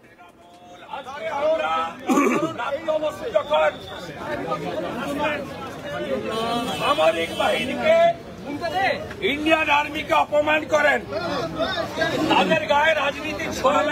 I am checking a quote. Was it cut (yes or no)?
yes